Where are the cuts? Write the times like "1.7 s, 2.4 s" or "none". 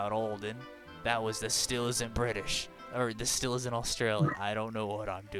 none